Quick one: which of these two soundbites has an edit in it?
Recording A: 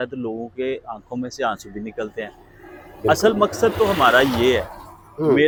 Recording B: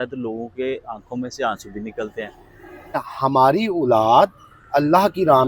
B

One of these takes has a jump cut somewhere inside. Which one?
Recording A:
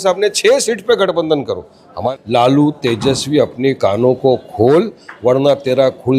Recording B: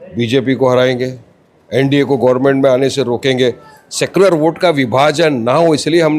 A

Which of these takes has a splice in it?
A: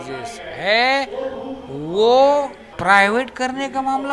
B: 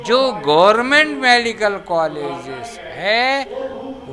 A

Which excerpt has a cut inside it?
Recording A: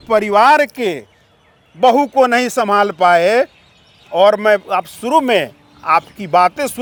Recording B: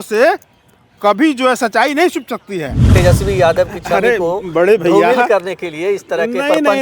B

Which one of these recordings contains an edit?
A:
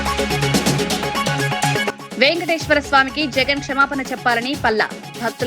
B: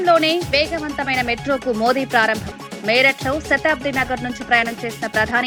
A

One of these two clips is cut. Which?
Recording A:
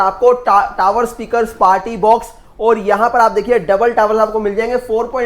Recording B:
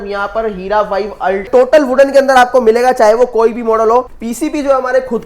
B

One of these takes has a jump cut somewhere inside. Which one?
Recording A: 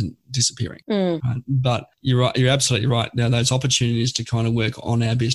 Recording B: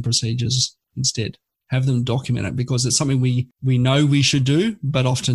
B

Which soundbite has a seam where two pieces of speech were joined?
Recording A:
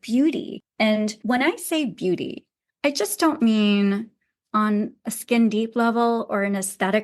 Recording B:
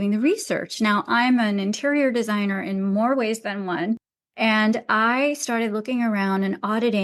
A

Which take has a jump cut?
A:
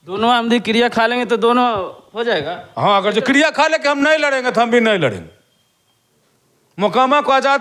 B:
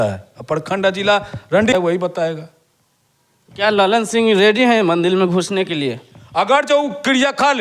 B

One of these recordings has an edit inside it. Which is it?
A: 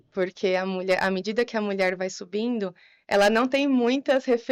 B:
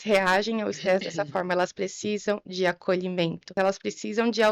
B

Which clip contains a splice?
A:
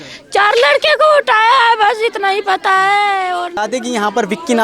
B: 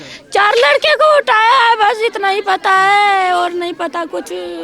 A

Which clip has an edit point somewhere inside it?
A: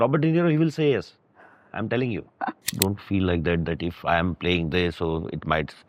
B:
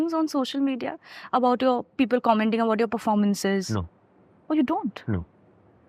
A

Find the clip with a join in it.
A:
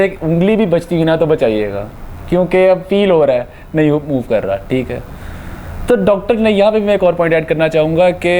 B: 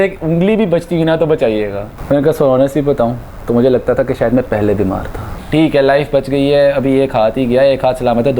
B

